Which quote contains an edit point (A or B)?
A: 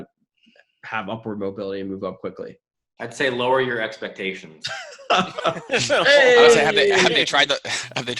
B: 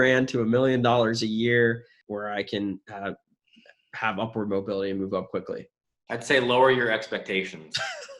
B